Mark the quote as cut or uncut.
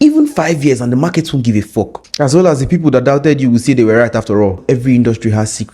cut